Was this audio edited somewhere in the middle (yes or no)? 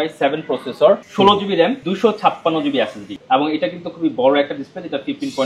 yes